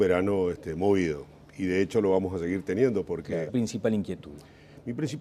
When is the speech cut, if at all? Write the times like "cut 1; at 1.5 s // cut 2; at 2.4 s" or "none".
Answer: none

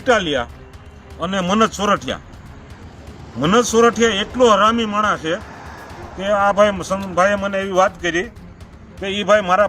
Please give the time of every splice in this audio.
none

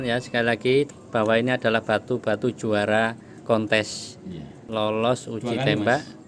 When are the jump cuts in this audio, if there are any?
cut 1; at 0.9 s // cut 2; at 4.6 s

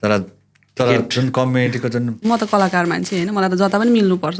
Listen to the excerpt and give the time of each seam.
cut 1; at 2.2 s

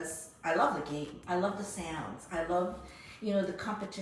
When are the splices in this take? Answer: none

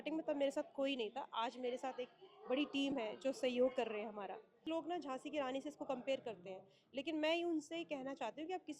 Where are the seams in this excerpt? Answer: cut 1; at 4.6 s

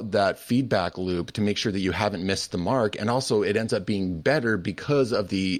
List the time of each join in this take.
none

